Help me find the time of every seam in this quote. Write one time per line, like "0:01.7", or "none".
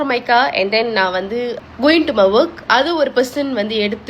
0:01.6